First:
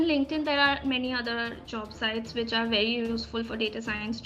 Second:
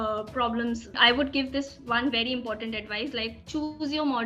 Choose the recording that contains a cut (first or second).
second